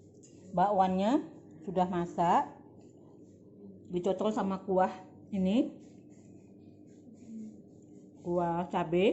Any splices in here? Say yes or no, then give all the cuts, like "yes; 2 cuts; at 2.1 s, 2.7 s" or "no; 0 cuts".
no; 0 cuts